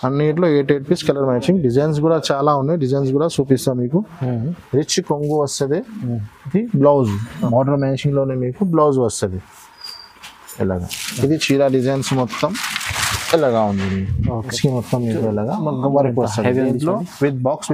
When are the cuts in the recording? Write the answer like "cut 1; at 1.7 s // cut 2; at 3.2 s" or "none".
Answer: cut 1; at 4.6 s // cut 2; at 14.5 s